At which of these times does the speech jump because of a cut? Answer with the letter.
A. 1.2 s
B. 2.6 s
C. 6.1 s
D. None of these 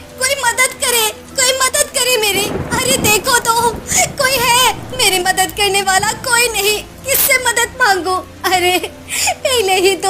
B